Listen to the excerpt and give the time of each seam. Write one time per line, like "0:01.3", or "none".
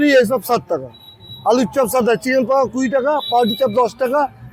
none